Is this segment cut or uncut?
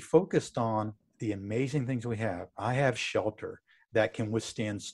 uncut